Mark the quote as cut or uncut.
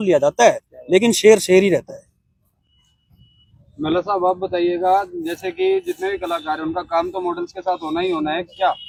uncut